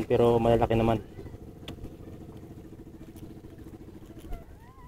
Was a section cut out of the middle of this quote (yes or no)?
no